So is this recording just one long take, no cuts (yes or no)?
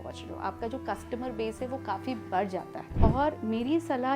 no